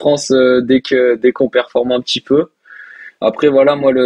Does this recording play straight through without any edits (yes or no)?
yes